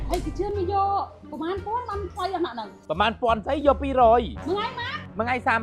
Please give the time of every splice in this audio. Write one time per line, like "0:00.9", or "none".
0:04.4